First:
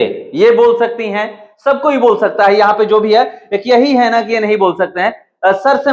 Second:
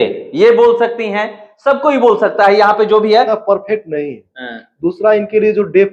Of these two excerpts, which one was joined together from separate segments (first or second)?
second